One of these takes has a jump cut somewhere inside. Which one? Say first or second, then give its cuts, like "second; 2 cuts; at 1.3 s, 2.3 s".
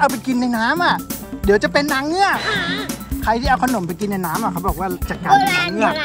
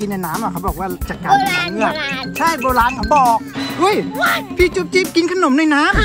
second; 1 cut; at 3.6 s